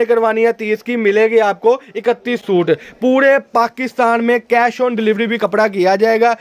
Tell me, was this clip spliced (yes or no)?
no